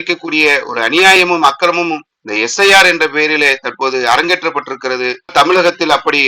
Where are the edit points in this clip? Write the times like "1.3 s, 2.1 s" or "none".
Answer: 5.3 s